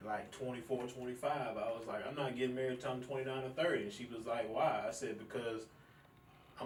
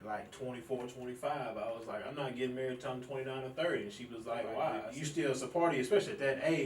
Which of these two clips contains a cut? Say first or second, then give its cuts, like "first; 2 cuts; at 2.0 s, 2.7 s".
second; 1 cut; at 4.9 s